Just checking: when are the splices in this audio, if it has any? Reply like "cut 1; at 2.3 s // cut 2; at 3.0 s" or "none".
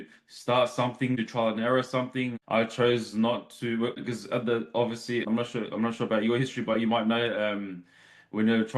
cut 1; at 1.2 s // cut 2; at 2.4 s // cut 3; at 4.0 s // cut 4; at 5.2 s